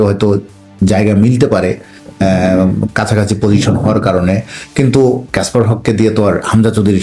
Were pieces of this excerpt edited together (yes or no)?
no